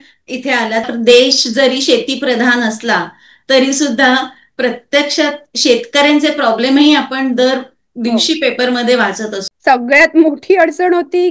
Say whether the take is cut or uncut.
cut